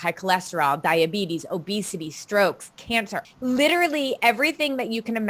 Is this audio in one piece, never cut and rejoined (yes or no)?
no